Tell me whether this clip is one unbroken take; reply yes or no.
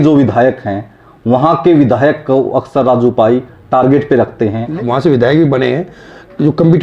no